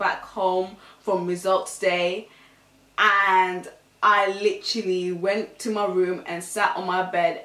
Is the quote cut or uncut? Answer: uncut